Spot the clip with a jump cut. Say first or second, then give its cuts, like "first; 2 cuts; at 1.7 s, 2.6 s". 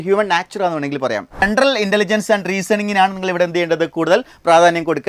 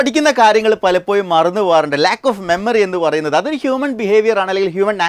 first; 1 cut; at 1.4 s